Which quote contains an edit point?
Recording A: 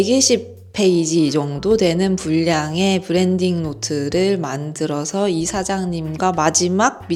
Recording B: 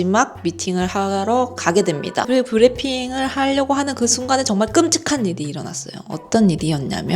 B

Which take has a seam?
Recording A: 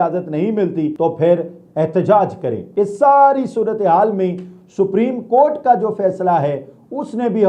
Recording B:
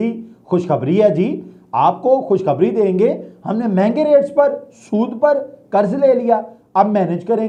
A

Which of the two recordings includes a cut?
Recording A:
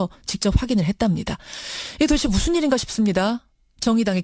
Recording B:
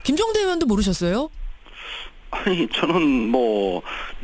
B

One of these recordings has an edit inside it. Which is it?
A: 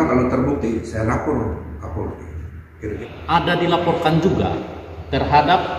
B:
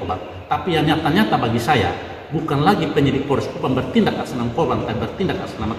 A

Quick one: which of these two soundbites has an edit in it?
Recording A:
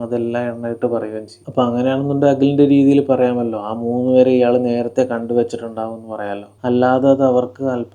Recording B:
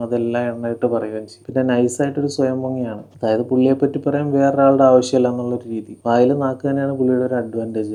A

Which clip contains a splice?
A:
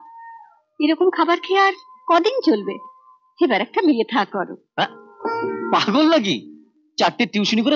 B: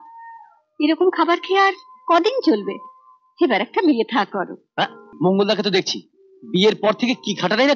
B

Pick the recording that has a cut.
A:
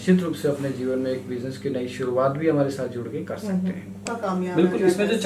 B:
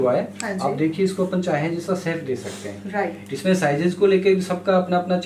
A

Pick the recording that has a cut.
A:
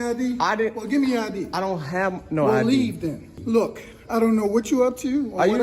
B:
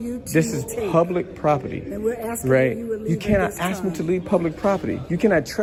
A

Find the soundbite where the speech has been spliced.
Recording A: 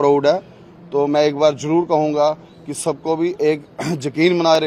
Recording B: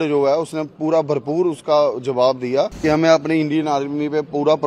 B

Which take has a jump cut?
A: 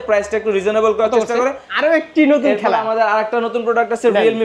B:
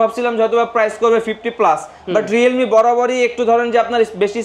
A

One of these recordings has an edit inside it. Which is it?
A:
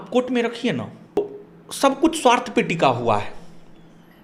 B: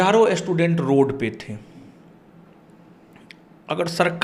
A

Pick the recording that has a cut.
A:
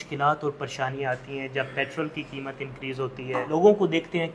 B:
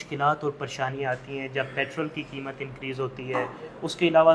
A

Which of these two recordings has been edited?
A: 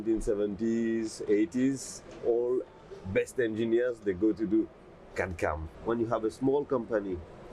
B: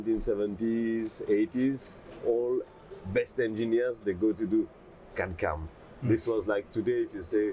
A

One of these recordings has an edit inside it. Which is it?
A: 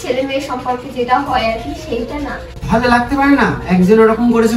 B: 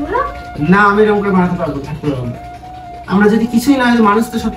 A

